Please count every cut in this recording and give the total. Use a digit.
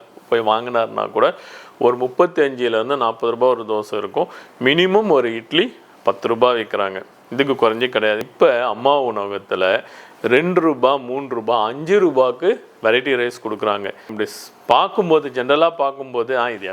2